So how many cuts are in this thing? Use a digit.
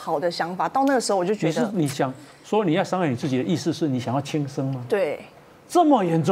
0